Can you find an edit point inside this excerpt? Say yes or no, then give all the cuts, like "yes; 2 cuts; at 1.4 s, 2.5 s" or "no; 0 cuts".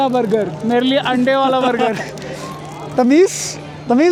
no; 0 cuts